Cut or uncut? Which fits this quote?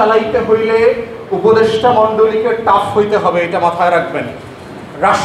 uncut